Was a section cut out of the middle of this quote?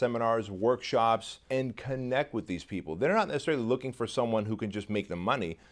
yes; 1 cut; at 1.4 s

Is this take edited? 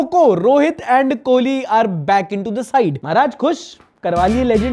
yes; 1 cut; at 3.0 s

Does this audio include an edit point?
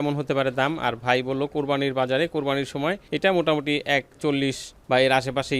yes; 1 cut; at 4.7 s

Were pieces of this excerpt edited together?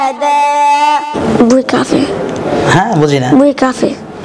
yes; 1 cut; at 1.2 s

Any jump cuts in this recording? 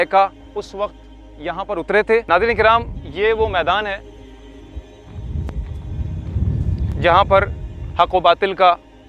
yes; 2 cuts; at 2.2 s, 7.0 s

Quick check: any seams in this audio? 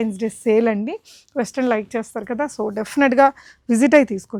no; 0 cuts

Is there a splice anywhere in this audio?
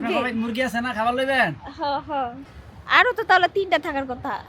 yes; 1 cut; at 2.5 s

